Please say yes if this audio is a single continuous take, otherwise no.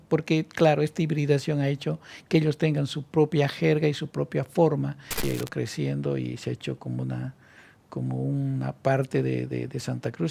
no